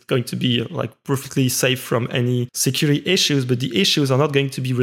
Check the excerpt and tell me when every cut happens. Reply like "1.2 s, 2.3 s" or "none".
2.5 s